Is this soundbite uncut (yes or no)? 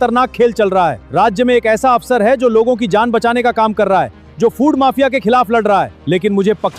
no